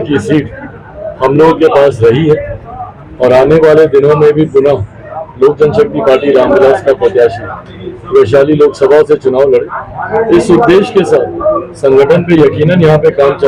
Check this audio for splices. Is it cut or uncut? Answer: uncut